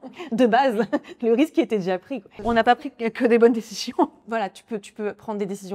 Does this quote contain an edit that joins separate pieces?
yes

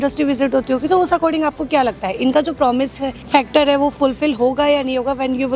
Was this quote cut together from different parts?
no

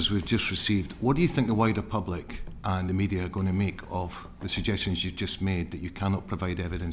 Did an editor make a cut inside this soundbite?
no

